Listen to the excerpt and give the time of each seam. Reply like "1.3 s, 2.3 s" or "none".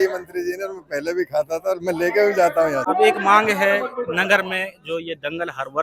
2.8 s